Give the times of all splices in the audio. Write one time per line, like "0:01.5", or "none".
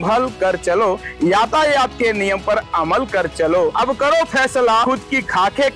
0:03.7
0:04.8